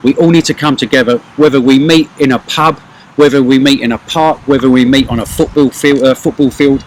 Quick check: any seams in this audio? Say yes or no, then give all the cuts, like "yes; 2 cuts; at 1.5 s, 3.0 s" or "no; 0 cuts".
no; 0 cuts